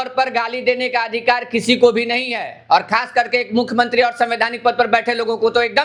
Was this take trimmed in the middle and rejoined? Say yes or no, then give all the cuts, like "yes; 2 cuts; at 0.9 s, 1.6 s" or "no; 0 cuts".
no; 0 cuts